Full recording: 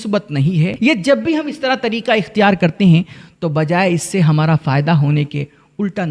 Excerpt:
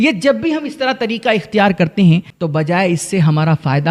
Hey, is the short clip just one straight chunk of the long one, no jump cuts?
no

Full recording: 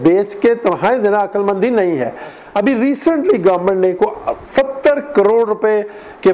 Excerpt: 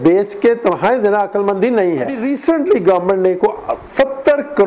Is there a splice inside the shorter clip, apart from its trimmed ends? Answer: yes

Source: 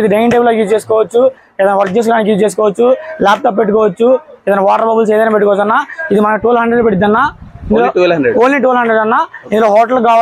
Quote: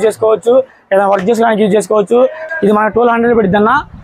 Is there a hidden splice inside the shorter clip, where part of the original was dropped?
yes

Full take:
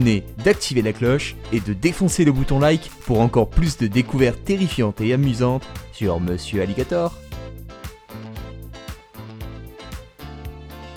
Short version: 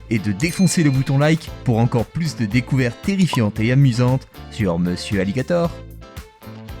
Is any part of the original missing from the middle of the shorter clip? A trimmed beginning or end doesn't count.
yes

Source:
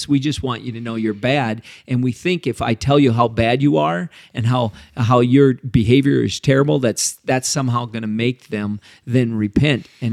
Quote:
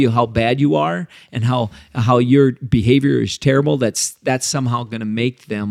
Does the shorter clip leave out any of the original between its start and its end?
no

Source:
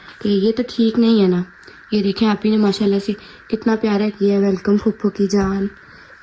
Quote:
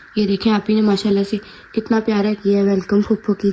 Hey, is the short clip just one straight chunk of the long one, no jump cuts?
yes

